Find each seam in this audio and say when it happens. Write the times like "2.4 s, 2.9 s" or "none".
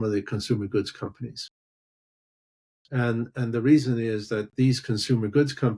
none